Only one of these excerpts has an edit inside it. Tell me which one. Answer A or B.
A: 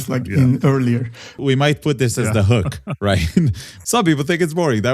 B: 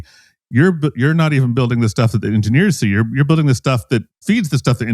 A